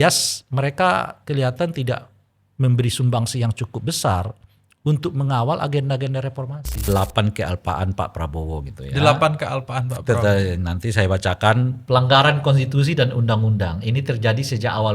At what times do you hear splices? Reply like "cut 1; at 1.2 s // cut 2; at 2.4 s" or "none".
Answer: cut 1; at 6.8 s // cut 2; at 11.8 s